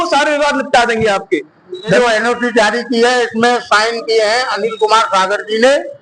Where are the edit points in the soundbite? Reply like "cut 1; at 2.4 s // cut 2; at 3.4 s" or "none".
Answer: cut 1; at 2.0 s